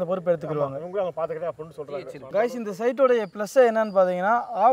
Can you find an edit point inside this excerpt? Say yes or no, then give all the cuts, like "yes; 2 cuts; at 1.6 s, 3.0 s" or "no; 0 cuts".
yes; 1 cut; at 2.2 s